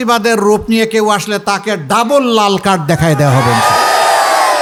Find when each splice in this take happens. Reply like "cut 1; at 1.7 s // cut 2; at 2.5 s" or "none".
none